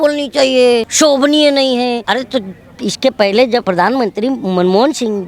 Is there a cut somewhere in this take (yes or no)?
yes